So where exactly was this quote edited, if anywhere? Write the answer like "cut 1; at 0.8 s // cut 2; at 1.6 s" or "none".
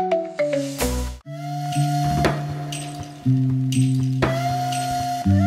cut 1; at 1.1 s